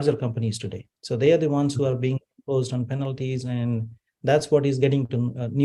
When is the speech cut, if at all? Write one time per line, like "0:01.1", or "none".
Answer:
none